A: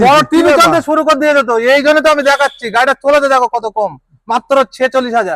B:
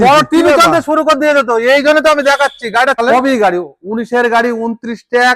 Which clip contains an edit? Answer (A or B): B